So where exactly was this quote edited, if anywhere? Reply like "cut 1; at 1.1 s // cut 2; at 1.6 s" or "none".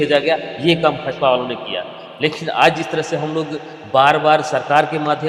none